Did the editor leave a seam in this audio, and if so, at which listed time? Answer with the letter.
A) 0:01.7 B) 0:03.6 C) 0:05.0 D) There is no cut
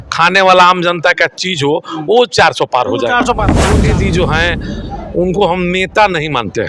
B